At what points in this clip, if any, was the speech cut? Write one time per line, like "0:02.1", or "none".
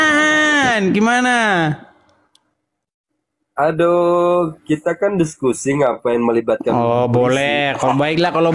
none

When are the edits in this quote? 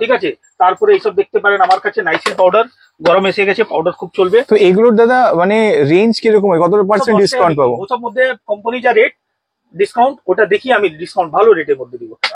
none

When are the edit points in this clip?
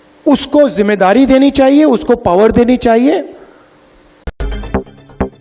0:04.3

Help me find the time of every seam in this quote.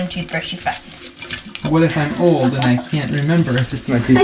none

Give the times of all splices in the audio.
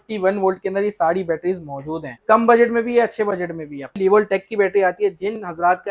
0:02.1
0:04.0

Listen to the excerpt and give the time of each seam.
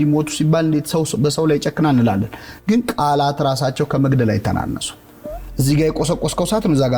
none

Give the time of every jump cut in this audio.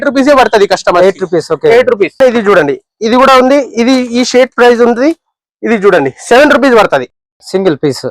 0:02.2

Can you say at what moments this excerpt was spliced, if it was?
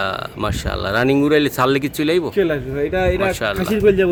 none

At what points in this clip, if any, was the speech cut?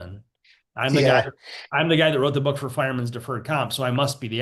none

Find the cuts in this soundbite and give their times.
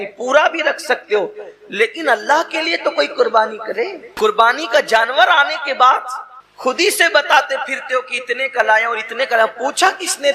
0:04.0

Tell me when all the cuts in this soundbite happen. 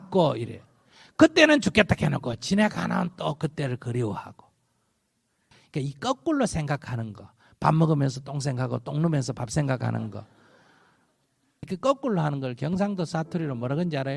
0:11.7

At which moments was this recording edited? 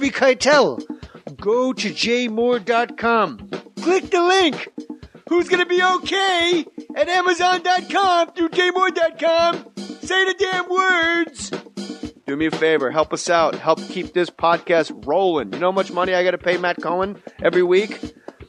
0:08.9

